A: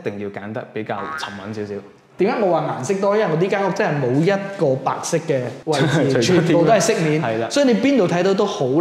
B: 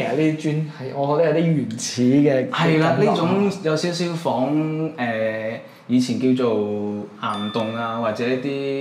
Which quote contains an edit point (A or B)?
A